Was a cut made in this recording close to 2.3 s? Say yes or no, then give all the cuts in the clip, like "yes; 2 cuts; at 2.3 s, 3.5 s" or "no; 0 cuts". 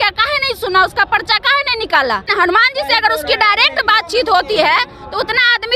yes; 1 cut; at 2.3 s